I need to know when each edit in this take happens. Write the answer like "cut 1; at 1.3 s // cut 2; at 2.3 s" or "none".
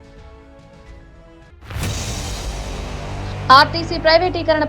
cut 1; at 1.6 s // cut 2; at 3.4 s